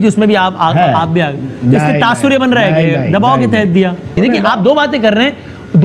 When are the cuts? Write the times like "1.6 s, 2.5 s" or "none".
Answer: 4.2 s